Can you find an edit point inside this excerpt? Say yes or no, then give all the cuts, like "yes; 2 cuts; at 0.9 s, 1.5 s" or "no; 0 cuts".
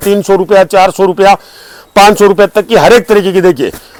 no; 0 cuts